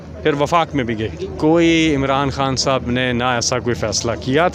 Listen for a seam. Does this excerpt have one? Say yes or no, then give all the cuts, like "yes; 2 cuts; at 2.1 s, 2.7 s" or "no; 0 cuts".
yes; 1 cut; at 1.2 s